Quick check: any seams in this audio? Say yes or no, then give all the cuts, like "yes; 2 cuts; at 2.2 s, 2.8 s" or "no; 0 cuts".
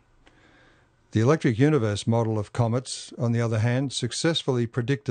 yes; 1 cut; at 1.4 s